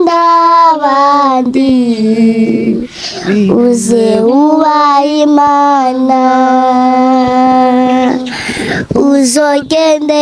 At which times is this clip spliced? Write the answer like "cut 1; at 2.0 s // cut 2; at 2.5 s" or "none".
none